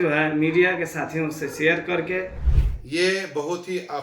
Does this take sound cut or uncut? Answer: cut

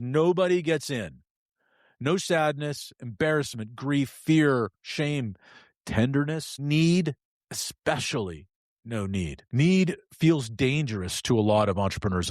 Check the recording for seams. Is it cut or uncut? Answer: cut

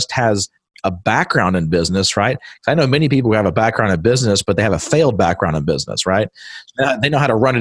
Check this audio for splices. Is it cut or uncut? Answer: uncut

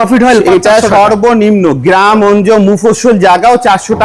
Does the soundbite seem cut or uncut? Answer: uncut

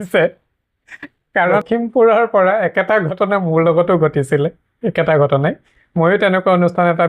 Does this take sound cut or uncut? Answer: uncut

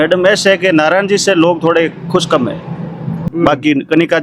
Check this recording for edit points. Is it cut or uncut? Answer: cut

